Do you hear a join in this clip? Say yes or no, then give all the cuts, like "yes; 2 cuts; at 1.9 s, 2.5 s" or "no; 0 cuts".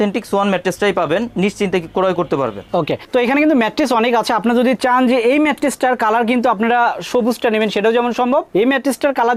no; 0 cuts